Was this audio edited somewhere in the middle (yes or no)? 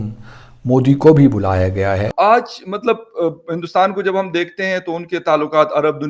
yes